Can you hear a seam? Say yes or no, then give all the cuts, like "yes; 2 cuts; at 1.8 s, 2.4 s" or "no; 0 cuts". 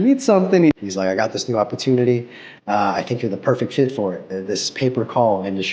yes; 2 cuts; at 0.7 s, 4.4 s